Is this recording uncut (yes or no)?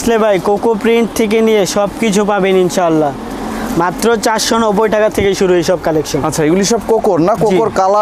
yes